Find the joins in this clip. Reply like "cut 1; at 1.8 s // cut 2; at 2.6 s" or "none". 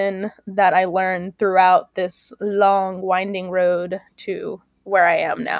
none